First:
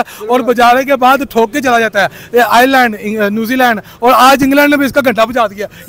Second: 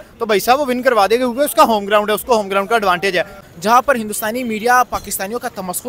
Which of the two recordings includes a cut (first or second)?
second